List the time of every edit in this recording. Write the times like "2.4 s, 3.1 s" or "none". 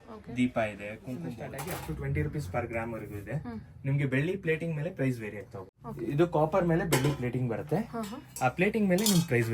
1.4 s, 5.8 s